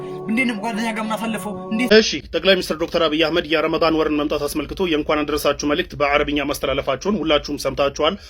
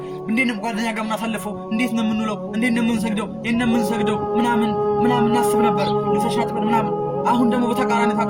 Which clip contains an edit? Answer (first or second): first